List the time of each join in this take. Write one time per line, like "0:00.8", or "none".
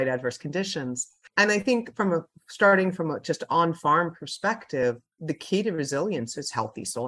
none